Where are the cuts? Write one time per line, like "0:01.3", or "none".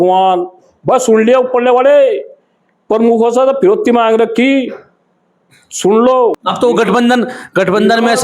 0:06.4